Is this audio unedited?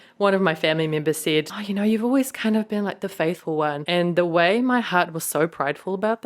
no; 2 cuts; at 1.5 s, 3.8 s

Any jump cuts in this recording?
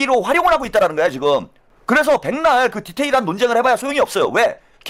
no; 0 cuts

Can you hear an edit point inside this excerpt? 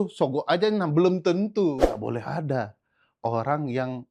yes; 1 cut; at 1.8 s

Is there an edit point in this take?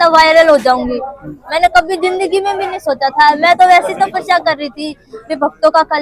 no; 0 cuts

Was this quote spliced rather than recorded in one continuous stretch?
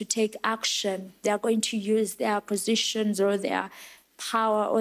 no; 0 cuts

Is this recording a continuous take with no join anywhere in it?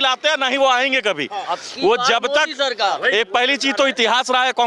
yes; 0 cuts

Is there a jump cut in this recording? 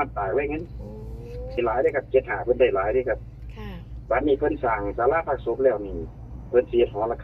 yes; 1 cut; at 1.6 s

